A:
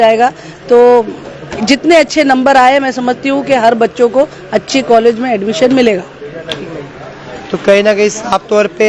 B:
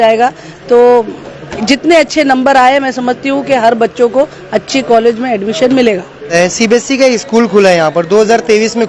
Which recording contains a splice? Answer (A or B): B